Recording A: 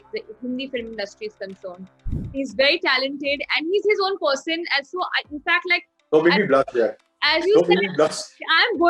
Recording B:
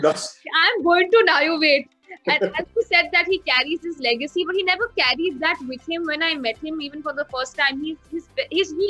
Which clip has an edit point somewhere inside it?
A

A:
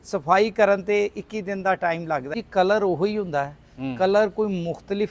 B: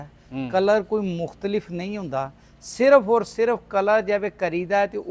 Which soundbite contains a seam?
A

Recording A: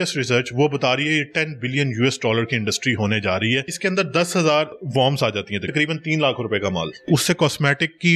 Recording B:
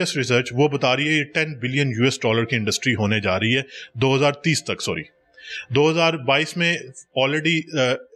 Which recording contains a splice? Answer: A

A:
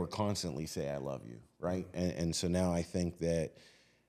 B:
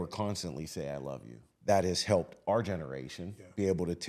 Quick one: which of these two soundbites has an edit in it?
B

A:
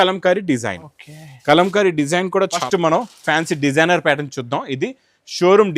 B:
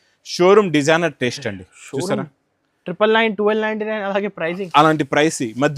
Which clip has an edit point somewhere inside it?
A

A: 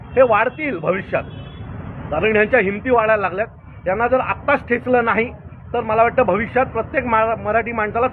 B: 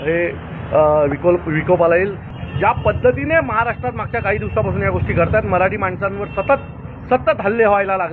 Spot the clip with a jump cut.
B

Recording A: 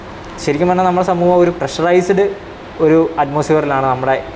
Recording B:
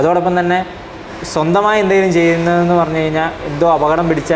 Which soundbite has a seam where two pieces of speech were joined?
A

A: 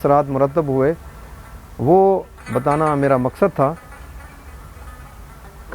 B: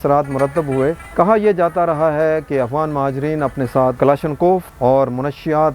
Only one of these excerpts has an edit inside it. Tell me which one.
B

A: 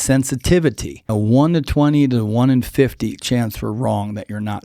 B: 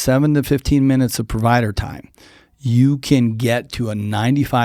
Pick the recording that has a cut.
A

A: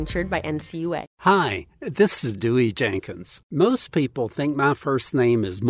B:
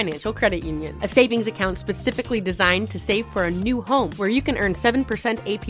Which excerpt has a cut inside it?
A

